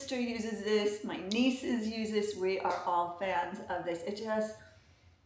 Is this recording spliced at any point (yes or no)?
no